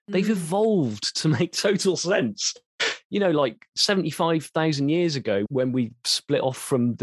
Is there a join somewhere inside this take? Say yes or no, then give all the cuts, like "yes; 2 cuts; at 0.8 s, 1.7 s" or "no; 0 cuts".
yes; 1 cut; at 5.5 s